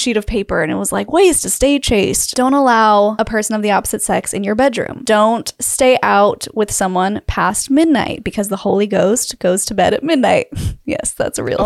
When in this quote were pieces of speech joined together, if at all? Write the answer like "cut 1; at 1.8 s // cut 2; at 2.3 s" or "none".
cut 1; at 2.2 s // cut 2; at 3.1 s // cut 3; at 5.0 s